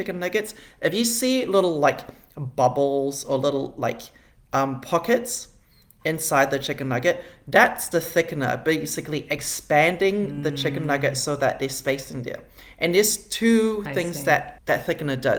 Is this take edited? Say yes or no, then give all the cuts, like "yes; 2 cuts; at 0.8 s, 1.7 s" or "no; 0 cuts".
no; 0 cuts